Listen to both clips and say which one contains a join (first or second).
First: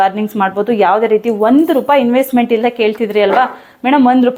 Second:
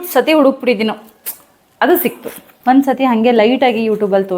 second